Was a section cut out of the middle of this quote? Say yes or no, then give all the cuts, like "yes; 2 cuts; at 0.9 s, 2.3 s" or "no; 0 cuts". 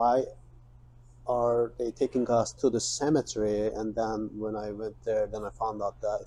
no; 0 cuts